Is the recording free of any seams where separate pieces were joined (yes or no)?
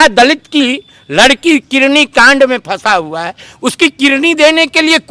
yes